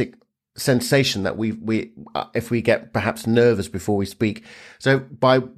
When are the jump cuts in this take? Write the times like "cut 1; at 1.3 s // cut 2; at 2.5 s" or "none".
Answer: none